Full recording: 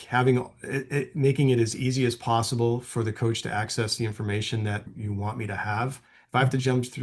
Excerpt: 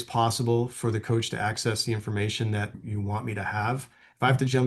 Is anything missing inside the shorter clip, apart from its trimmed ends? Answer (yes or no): no